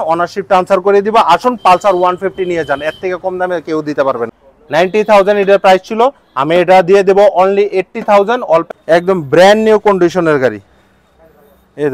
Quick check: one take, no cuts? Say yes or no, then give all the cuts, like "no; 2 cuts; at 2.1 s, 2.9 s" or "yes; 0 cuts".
no; 2 cuts; at 4.3 s, 8.6 s